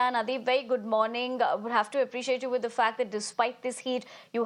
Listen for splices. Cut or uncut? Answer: uncut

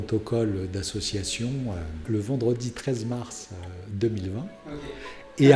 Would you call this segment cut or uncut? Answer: cut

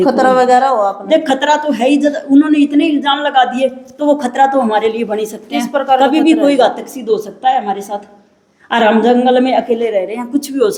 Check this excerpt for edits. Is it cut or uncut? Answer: uncut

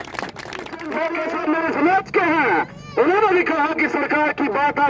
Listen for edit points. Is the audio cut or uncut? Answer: cut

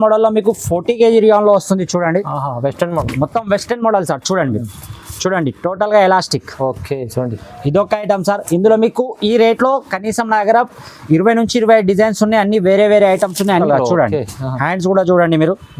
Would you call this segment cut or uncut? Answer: cut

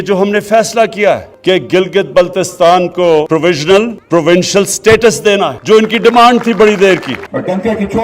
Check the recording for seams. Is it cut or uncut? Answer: cut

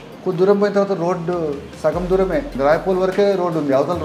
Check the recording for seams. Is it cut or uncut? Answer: cut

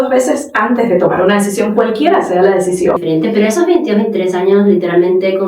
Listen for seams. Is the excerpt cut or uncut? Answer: cut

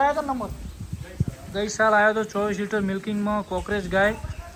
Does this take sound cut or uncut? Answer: uncut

